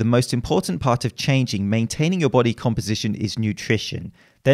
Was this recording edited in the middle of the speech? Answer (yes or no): no